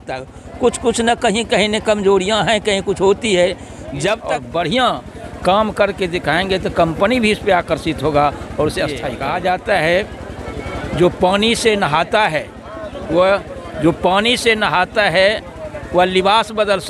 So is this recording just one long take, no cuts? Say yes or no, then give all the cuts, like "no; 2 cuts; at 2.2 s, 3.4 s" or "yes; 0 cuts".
no; 2 cuts; at 4.3 s, 9.1 s